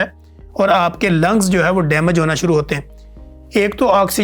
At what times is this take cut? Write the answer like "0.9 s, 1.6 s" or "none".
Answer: none